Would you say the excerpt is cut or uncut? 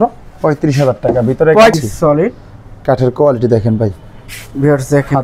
cut